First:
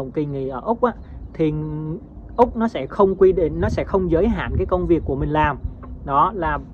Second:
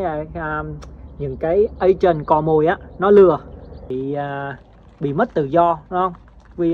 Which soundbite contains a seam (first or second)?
second